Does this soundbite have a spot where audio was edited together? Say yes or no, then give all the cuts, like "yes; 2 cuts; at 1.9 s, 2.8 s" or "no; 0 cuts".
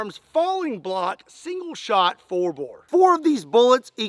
yes; 1 cut; at 2.7 s